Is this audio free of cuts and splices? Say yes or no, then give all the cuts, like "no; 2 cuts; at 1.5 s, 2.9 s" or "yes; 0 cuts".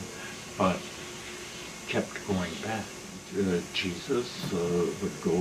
no; 1 cut; at 3.2 s